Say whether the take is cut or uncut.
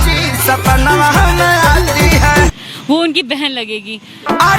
uncut